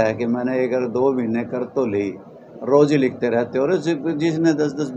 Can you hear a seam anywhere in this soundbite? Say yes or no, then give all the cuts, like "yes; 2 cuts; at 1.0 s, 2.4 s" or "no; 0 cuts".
no; 0 cuts